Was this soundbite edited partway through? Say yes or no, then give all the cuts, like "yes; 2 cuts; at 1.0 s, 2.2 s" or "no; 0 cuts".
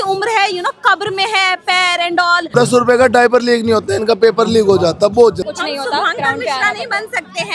yes; 2 cuts; at 2.5 s, 5.4 s